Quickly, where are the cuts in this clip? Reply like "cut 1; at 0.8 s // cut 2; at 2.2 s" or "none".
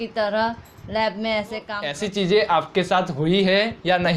cut 1; at 1.8 s